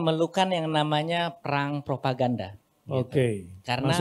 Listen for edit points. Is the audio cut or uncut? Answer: uncut